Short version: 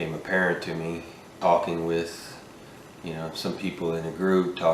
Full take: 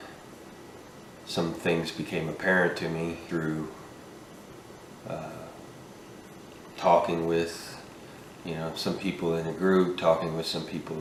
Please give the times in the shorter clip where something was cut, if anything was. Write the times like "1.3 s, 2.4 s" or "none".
1.1 s